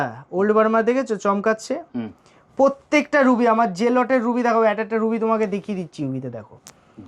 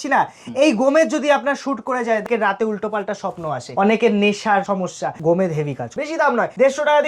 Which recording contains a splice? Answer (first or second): second